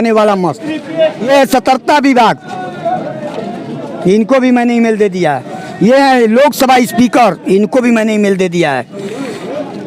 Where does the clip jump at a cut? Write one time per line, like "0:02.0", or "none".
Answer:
0:01.2